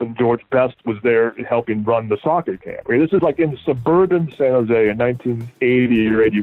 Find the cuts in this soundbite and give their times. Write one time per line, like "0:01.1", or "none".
none